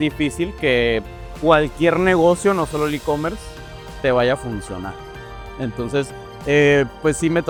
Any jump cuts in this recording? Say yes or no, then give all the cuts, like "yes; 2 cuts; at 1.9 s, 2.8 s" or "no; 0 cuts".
no; 0 cuts